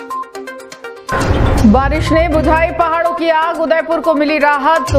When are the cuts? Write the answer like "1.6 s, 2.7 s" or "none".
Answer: 1.1 s